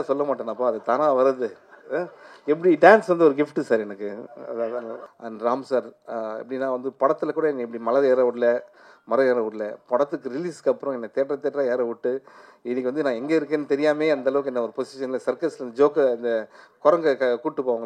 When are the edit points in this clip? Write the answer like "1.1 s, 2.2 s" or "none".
5.0 s